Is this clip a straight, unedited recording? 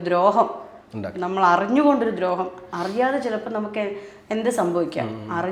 yes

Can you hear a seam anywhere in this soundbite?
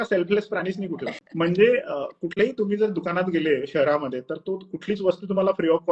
yes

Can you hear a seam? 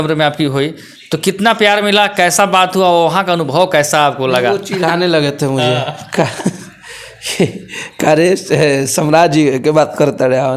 no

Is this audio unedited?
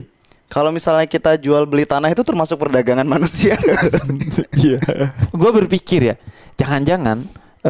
no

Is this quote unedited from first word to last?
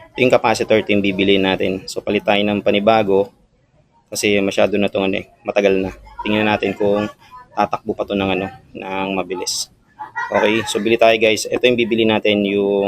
yes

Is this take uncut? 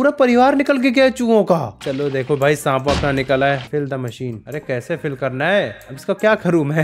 no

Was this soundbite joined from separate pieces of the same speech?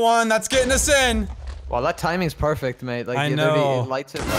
no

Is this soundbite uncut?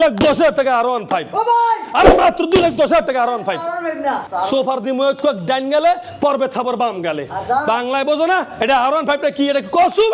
yes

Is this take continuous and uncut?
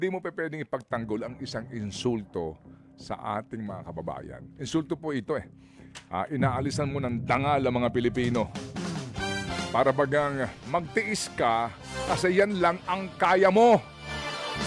yes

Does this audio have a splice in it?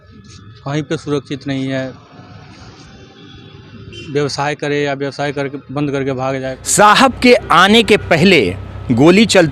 yes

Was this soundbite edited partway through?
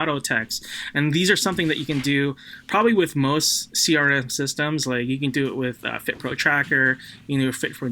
no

